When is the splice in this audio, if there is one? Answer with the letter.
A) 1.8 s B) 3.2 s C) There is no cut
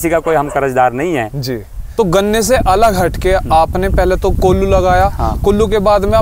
A